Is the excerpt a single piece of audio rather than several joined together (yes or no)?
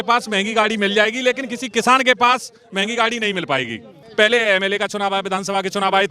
no